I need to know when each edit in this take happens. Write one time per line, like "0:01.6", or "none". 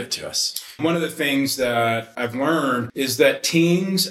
0:00.8
0:02.5

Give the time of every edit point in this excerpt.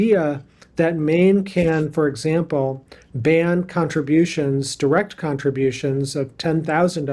none

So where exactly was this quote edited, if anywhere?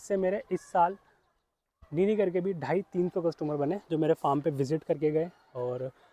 none

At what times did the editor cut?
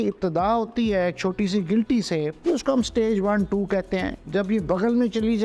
0:02.3

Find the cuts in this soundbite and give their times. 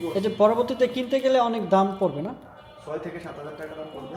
none

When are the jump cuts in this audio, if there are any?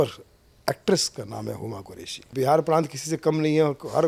0:02.3

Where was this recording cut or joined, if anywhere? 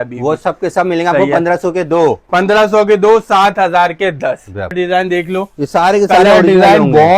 0:04.7

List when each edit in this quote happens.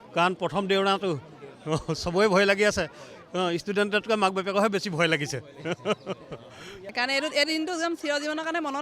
0:06.9

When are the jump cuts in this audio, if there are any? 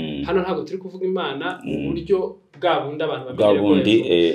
none

